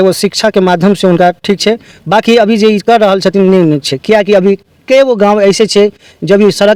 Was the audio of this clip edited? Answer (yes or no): no